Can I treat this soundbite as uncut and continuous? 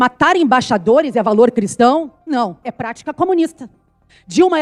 yes; 0 cuts

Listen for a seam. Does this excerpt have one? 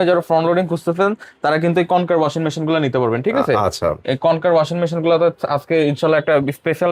no; 0 cuts

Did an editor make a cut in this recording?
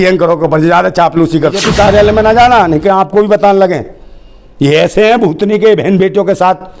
yes; 1 cut; at 1.6 s

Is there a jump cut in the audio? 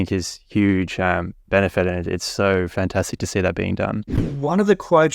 yes; 1 cut; at 4.2 s

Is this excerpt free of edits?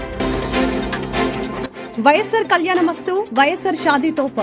no; 1 cut; at 1.2 s

